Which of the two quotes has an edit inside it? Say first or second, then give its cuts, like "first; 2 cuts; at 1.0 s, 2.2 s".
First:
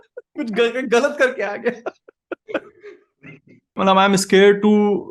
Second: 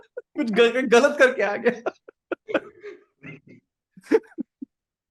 first; 1 cut; at 3.8 s